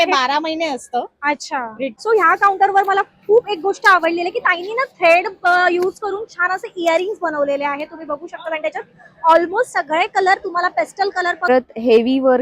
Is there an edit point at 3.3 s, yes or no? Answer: no